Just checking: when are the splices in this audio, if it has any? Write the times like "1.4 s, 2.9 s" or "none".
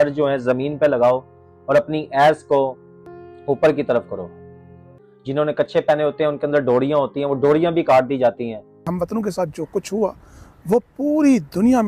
8.9 s